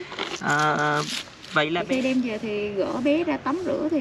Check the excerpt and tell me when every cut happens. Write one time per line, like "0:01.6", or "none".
0:01.8